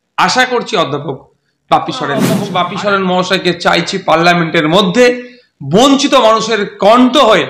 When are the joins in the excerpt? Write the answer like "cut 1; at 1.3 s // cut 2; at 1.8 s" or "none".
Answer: cut 1; at 2.4 s

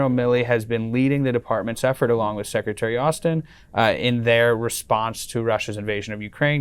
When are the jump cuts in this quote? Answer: none

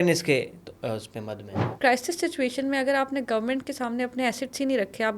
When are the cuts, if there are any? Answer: cut 1; at 1.6 s

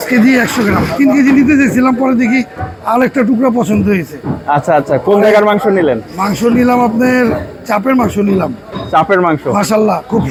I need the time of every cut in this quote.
none

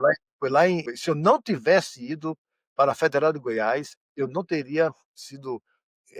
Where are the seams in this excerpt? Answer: cut 1; at 0.9 s

